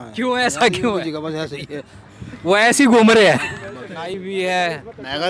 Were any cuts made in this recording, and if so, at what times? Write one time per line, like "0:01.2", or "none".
0:04.2